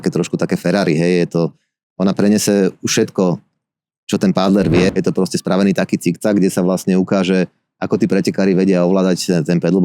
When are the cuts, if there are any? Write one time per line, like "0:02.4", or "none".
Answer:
0:04.9